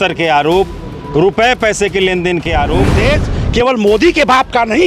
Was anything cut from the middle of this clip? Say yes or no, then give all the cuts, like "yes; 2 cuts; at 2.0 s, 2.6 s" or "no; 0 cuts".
yes; 1 cut; at 3.0 s